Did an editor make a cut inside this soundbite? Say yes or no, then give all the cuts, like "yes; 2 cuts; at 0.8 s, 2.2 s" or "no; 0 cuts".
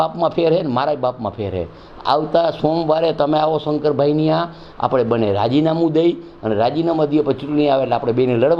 no; 0 cuts